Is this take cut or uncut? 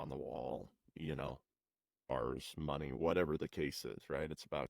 cut